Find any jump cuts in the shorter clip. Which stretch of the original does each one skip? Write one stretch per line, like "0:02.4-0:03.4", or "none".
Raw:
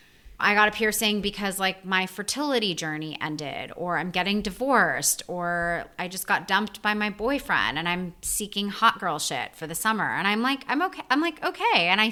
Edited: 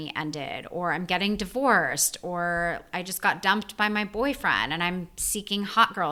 none